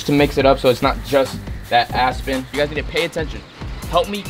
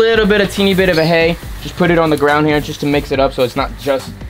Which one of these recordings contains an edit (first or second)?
first